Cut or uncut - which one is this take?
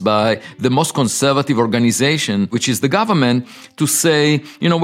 cut